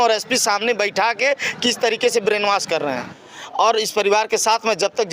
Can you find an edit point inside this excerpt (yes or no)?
yes